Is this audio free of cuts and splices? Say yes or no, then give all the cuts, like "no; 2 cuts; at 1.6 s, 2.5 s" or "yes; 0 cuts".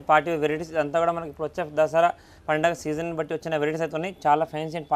yes; 0 cuts